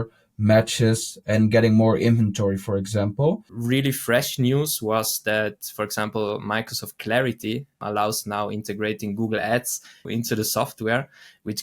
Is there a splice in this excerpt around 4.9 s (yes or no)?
no